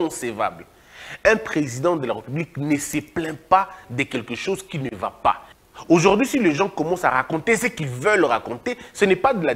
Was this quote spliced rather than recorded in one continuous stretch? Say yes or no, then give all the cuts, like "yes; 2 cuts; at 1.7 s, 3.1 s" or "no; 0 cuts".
yes; 1 cut; at 5.5 s